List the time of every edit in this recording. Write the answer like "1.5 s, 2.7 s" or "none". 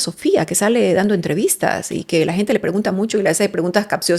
none